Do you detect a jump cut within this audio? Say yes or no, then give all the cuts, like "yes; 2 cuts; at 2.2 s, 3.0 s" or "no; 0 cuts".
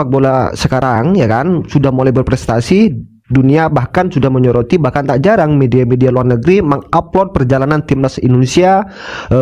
no; 0 cuts